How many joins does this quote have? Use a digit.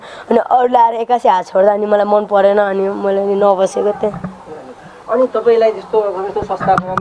0